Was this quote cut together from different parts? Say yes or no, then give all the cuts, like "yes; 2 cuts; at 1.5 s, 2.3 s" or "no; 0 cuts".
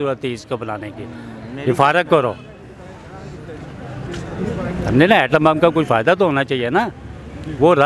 no; 0 cuts